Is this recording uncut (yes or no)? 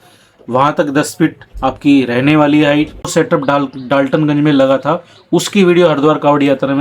no